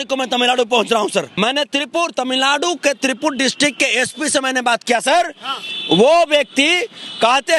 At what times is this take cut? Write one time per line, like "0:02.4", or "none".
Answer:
0:01.3